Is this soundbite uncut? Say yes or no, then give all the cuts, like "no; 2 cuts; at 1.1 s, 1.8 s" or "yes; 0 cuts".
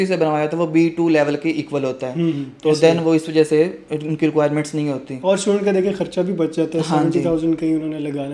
yes; 0 cuts